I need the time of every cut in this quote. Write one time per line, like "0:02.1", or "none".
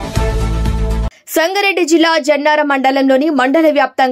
0:01.2

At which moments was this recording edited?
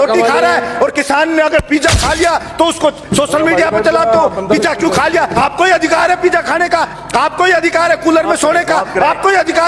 0:05.3

